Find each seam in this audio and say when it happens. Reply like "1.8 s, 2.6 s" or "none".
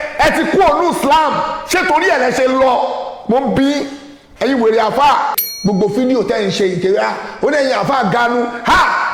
5.5 s